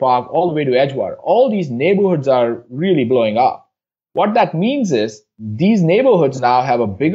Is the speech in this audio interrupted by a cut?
no; 0 cuts

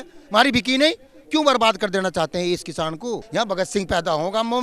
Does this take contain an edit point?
yes; 2 cuts; at 1.1 s, 3.2 s

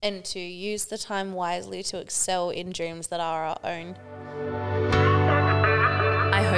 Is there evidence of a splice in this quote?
yes; 1 cut; at 4.3 s

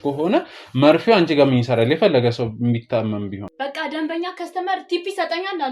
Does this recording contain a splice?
yes; 1 cut; at 3.5 s

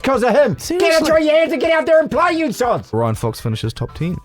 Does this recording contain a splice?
yes; 1 cut; at 2.9 s

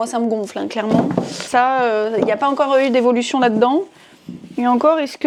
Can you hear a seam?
no; 0 cuts

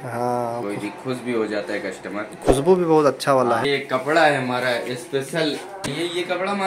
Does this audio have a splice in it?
yes; 2 cuts; at 3.6 s, 5.9 s

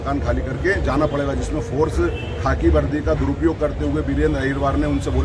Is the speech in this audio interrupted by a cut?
no; 0 cuts

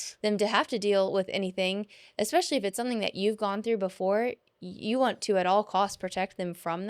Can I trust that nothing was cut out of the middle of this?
yes; 0 cuts

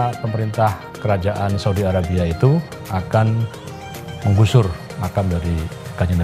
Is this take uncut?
yes; 0 cuts

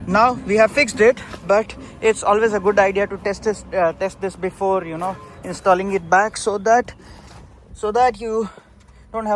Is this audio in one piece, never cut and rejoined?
yes; 0 cuts

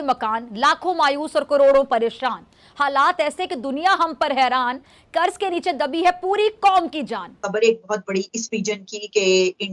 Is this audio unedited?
no; 1 cut; at 7.4 s

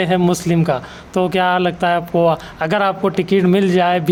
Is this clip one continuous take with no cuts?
yes; 0 cuts

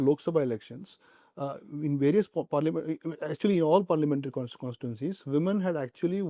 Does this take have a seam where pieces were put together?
no; 0 cuts

